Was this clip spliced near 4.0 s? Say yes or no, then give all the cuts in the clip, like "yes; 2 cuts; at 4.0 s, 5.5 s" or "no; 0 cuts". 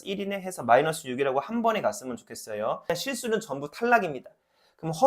no; 1 cut; at 2.8 s